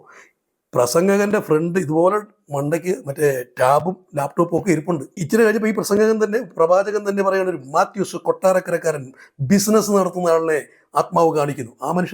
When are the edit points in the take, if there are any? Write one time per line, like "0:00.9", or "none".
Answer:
0:05.2